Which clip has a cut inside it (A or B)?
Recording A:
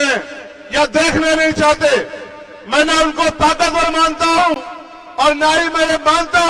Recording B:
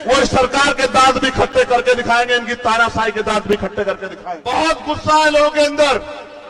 B